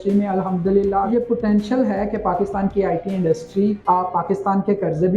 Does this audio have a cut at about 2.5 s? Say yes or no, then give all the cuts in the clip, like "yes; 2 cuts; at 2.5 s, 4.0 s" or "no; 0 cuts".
no; 2 cuts; at 1.1 s, 3.8 s